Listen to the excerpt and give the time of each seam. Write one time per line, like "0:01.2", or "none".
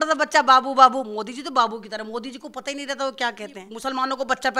0:03.6